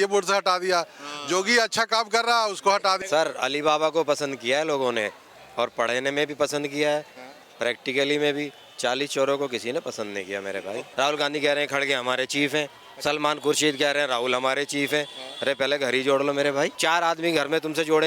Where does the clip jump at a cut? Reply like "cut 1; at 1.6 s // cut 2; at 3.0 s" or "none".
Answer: cut 1; at 3.0 s // cut 2; at 10.8 s // cut 3; at 16.8 s